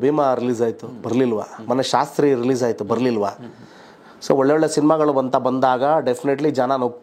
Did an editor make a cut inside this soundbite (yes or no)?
no